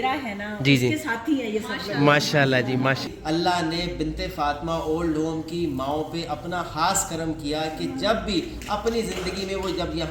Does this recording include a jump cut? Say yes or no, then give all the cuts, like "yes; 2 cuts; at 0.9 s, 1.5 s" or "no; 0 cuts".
yes; 1 cut; at 3.1 s